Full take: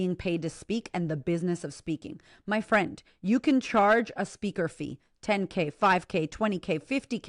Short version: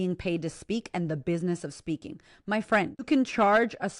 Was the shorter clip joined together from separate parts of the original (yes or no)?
yes